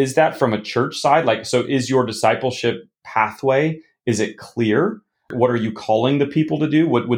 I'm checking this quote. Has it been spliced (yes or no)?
yes